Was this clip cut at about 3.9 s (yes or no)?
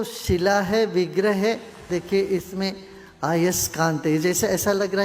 no